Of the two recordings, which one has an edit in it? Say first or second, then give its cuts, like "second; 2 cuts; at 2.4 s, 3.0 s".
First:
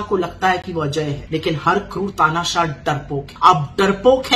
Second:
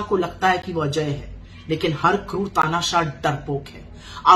first; 2 cuts; at 1.2 s, 3.3 s